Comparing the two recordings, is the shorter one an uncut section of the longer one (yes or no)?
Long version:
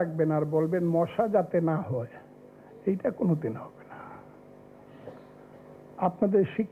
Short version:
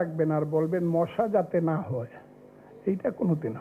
yes